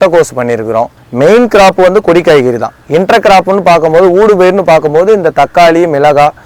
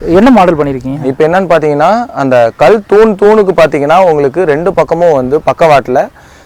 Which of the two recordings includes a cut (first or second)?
first